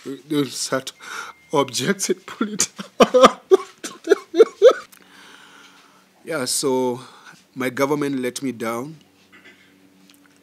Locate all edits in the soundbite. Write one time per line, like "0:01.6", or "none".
0:04.8